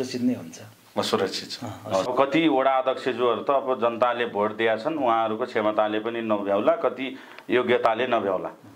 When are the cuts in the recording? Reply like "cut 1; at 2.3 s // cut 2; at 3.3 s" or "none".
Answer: cut 1; at 2.1 s